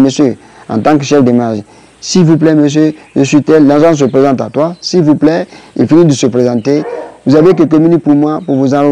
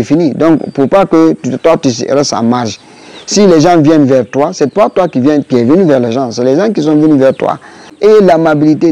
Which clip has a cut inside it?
second; 1 cut; at 7.9 s

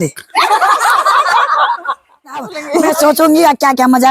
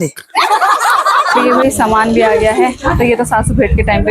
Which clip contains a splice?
second; 1 cut; at 1.4 s

